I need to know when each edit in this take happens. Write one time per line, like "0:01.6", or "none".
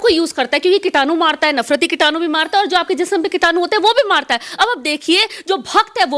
none